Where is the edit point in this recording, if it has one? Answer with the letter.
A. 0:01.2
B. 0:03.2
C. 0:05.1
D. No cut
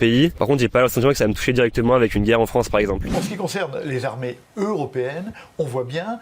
B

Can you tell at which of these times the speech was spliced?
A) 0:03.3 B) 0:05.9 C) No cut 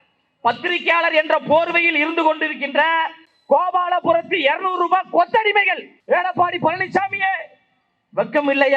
B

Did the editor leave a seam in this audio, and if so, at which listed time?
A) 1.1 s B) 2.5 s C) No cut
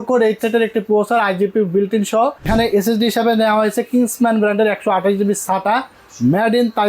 B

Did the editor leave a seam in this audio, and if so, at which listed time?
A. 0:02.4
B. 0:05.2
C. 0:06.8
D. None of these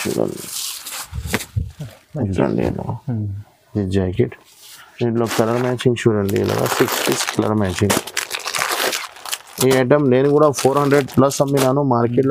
A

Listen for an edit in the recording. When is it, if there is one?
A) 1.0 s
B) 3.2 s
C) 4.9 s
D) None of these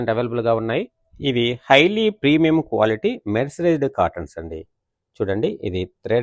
A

